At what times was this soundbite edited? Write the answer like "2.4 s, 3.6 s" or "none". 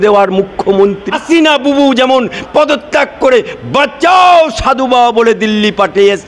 1.2 s